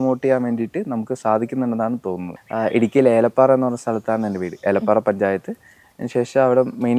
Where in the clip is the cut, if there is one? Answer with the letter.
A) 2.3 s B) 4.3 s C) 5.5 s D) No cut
A